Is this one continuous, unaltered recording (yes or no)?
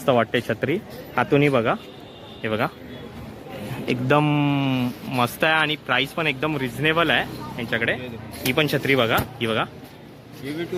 yes